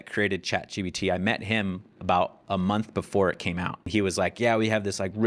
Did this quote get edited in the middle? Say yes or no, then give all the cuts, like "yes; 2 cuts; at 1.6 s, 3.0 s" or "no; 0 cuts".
yes; 1 cut; at 3.8 s